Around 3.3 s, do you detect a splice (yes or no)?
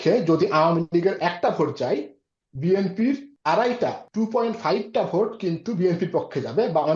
yes